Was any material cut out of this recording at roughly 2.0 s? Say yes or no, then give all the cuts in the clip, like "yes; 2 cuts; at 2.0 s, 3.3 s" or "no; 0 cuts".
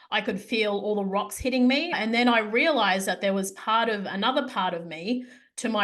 yes; 1 cut; at 2.0 s